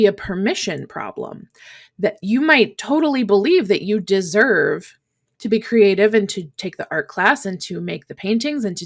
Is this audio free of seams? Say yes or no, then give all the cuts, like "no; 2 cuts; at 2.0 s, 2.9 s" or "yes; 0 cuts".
yes; 0 cuts